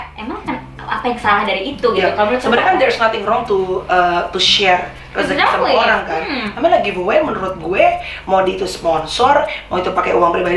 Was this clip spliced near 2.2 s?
no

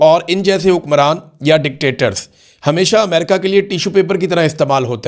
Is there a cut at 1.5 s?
no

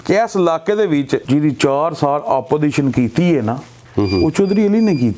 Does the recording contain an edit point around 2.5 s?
no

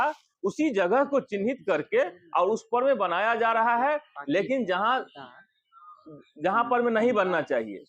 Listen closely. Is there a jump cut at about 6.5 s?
no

